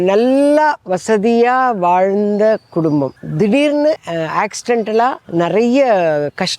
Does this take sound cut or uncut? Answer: cut